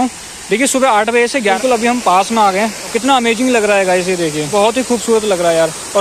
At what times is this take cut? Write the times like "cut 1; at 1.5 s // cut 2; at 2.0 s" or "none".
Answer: cut 1; at 1.6 s // cut 2; at 2.9 s // cut 3; at 4.4 s